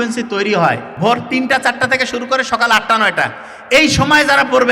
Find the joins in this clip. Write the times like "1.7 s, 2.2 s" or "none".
0.9 s

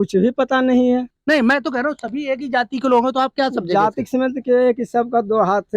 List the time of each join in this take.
1.1 s

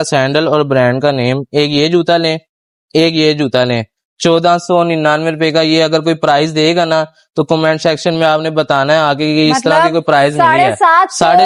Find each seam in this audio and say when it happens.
none

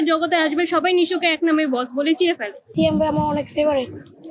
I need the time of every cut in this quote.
2.6 s

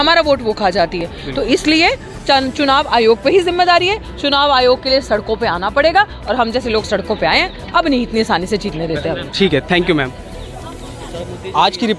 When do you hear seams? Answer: none

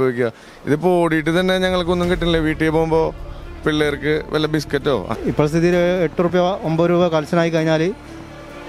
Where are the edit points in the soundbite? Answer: 5.1 s

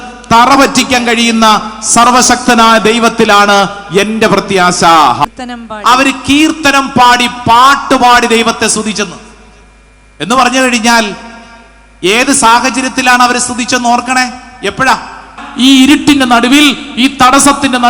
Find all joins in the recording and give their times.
5.2 s, 15.4 s

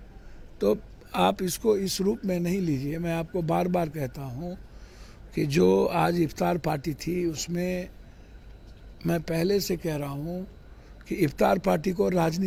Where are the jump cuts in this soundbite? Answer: none

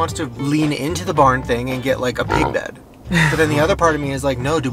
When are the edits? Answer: none

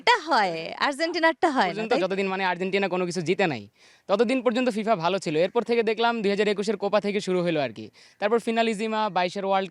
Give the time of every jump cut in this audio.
1.9 s

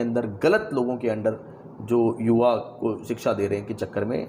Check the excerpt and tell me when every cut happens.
none

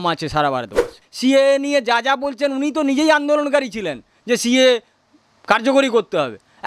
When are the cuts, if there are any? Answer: 0.9 s

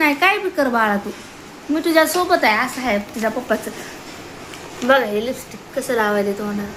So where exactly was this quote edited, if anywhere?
none

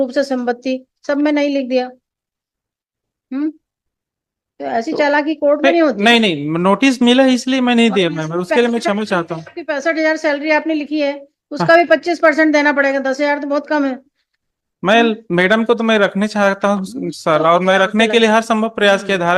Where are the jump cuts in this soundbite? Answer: none

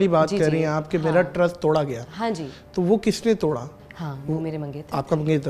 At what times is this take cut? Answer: 3.8 s

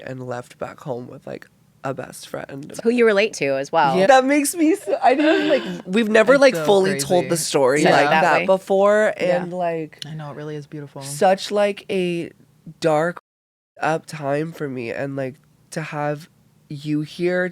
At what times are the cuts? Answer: 2.6 s, 4.1 s

